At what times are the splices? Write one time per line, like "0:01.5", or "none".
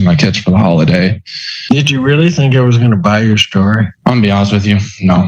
0:01.4